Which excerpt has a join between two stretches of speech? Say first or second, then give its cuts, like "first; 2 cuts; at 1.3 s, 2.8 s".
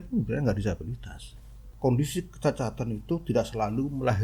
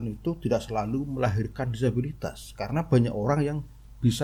first; 1 cut; at 1.7 s